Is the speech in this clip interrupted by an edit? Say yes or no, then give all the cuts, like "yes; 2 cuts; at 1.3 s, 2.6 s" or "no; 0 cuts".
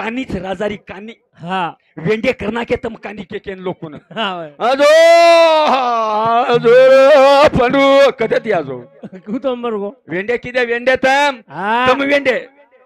no; 0 cuts